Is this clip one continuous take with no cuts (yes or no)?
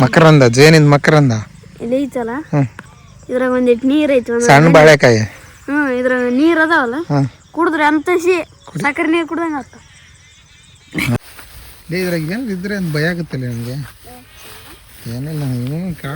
no